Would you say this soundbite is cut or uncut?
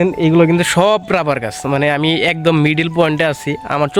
uncut